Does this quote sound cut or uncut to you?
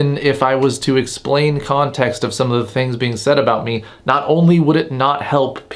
uncut